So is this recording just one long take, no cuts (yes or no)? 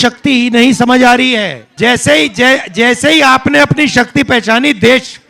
no